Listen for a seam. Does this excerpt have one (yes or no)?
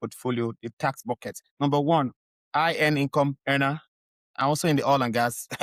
no